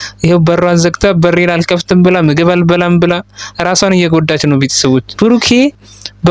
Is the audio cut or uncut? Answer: cut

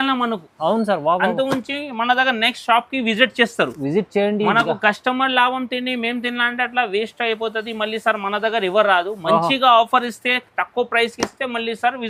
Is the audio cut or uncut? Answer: uncut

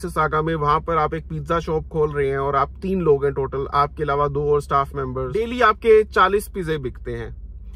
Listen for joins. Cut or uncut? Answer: cut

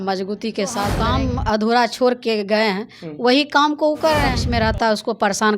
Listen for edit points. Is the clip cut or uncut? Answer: cut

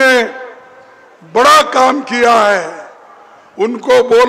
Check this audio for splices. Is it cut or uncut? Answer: uncut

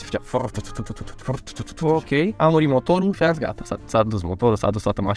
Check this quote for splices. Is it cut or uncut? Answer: uncut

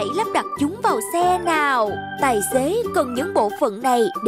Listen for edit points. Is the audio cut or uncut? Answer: cut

